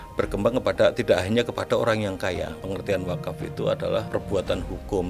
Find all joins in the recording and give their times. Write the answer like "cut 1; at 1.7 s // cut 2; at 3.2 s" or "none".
cut 1; at 2.6 s // cut 2; at 4.1 s